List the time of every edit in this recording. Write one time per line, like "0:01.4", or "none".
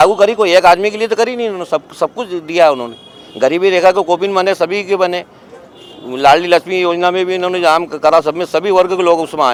none